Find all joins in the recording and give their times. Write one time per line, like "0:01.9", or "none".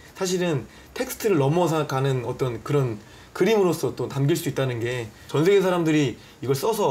0:05.1